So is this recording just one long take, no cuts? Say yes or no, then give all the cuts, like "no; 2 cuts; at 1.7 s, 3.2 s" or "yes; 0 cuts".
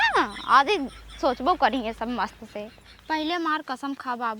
no; 1 cut; at 2.9 s